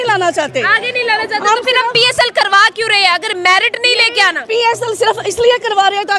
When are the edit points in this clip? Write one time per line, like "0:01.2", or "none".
none

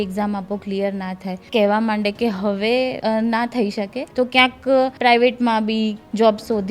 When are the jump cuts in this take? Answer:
0:01.4
0:03.0
0:04.0
0:04.9

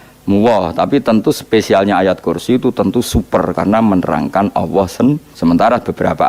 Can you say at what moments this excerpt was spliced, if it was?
0:05.3

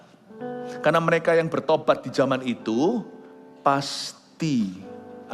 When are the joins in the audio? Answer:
none

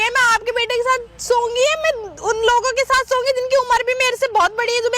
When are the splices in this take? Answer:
none

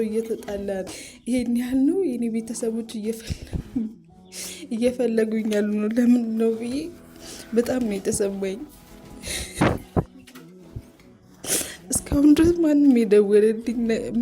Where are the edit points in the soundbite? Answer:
0:01.0

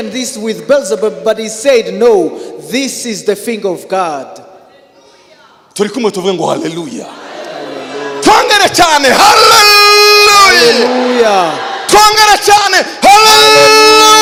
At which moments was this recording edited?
none

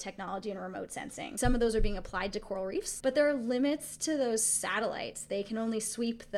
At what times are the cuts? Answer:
0:01.3
0:02.9

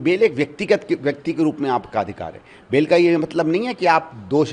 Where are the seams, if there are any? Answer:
none

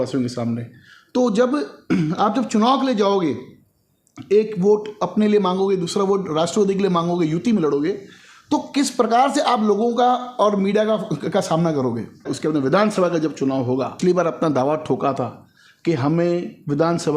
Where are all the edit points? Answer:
0:12.3
0:13.9

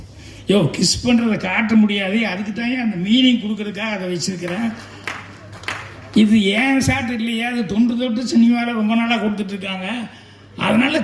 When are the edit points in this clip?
none

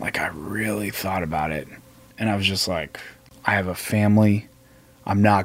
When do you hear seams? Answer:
0:02.1
0:03.2

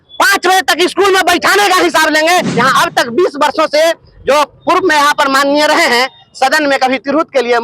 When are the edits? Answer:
0:02.5

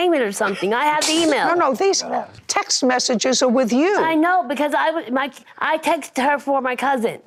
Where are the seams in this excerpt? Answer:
none

